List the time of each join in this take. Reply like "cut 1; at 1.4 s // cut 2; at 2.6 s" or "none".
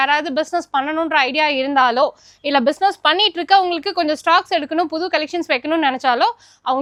none